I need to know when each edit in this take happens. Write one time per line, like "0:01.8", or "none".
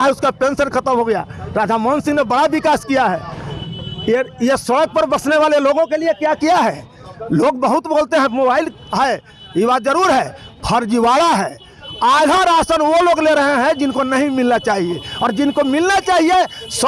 none